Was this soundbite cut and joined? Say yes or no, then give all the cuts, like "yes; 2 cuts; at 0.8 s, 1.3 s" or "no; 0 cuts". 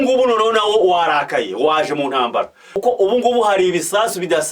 yes; 1 cut; at 2.8 s